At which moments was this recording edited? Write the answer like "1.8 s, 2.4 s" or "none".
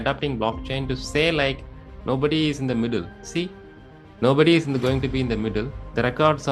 none